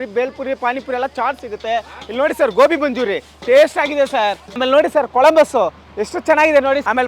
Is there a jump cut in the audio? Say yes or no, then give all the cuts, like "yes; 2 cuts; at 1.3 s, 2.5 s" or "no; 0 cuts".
yes; 1 cut; at 4.6 s